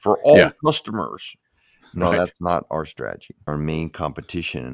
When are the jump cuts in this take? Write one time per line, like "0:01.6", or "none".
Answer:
0:03.5